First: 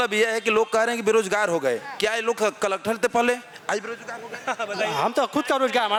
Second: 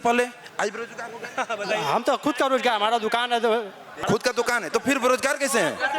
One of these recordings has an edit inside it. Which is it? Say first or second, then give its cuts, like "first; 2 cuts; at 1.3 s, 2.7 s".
second; 1 cut; at 4.0 s